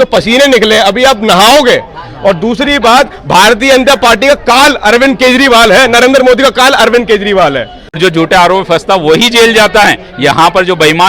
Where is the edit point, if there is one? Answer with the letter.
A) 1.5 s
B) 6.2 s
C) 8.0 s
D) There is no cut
C